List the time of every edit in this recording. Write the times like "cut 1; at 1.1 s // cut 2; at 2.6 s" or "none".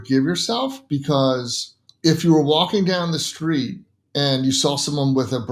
none